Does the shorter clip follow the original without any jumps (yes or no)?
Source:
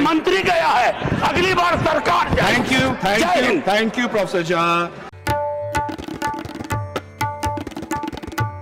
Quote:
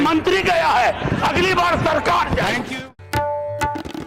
no